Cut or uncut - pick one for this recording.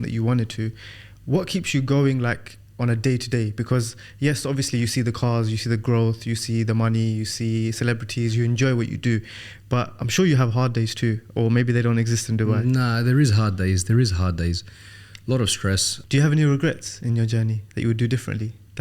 cut